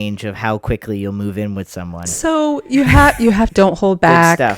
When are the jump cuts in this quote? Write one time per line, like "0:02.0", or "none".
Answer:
0:03.5